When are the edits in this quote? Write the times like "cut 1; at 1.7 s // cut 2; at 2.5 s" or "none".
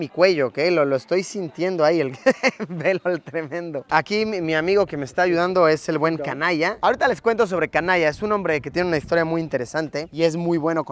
none

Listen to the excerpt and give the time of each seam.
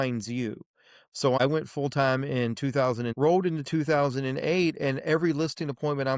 cut 1; at 1.4 s // cut 2; at 3.1 s

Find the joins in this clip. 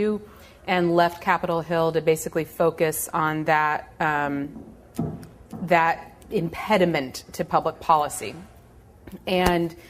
cut 1; at 7.0 s

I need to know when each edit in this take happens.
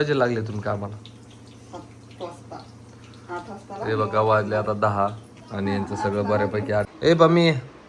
cut 1; at 6.9 s

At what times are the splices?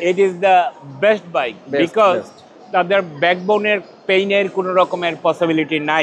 none

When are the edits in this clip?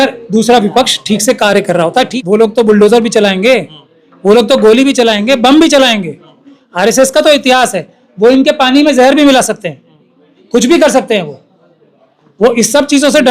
cut 1; at 2.1 s

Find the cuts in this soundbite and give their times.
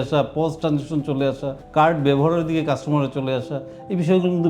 cut 1; at 1.6 s

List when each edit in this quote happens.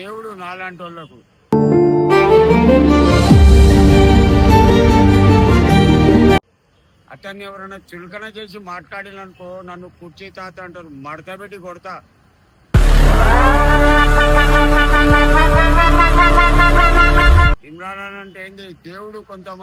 none

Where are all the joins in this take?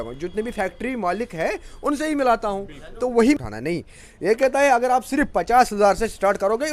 cut 1; at 3.4 s

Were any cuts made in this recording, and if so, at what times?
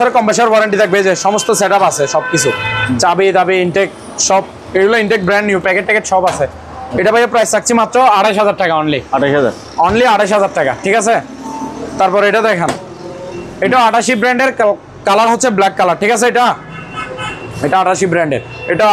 none

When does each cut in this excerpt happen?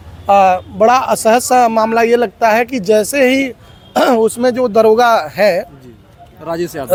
none

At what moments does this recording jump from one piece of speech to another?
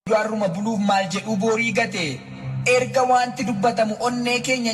cut 1; at 3.2 s

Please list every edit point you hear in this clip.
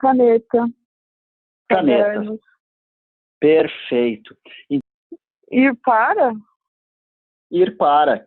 cut 1; at 4.8 s

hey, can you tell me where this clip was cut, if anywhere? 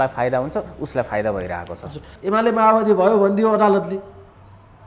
cut 1; at 2.1 s

